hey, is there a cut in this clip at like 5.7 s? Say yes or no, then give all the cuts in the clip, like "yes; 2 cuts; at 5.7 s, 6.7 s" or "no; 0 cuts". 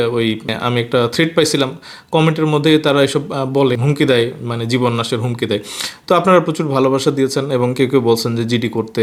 no; 0 cuts